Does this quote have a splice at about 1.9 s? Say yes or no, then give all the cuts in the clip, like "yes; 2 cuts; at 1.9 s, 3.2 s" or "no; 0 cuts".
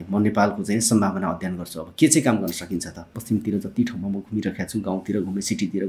no; 1 cut; at 3.2 s